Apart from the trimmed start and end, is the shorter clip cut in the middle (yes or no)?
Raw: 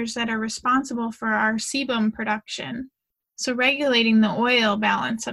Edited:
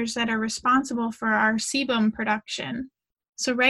no